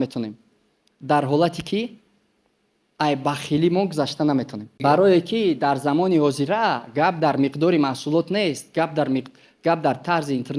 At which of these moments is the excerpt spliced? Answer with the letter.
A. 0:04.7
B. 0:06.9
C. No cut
A